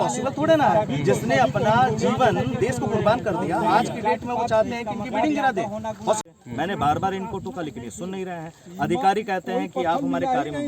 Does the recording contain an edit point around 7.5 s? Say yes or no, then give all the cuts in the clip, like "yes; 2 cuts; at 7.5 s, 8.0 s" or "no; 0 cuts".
no; 1 cut; at 6.2 s